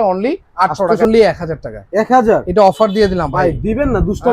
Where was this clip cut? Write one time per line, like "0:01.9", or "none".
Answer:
0:01.1